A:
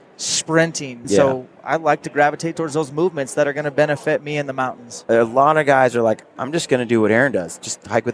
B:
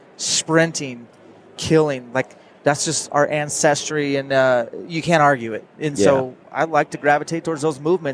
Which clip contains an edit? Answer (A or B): A